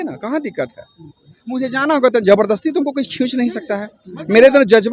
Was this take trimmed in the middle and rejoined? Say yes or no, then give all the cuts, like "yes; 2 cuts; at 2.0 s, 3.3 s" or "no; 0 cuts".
no; 0 cuts